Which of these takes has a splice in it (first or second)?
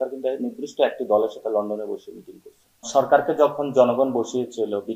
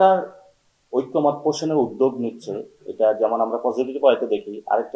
first